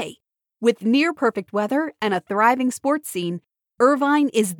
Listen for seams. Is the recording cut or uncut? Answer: uncut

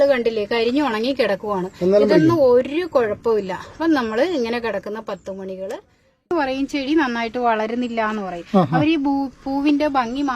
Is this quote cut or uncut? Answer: cut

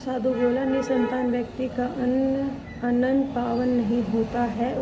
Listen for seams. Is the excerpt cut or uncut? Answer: uncut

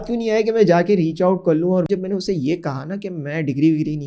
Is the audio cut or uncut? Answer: cut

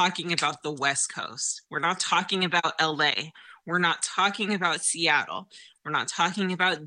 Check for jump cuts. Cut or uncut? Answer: uncut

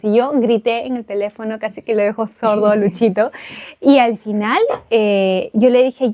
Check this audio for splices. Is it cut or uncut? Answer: uncut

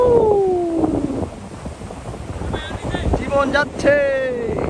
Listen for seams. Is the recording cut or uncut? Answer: uncut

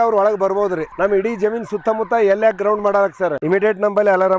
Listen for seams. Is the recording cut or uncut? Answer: cut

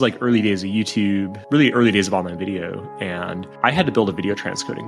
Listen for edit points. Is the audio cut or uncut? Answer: uncut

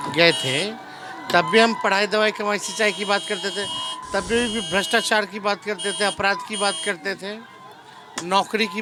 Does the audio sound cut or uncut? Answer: uncut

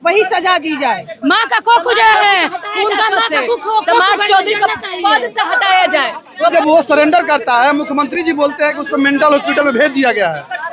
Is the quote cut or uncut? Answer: cut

